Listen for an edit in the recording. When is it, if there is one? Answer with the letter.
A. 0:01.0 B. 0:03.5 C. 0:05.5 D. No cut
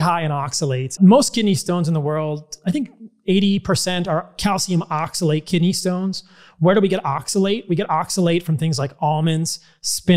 A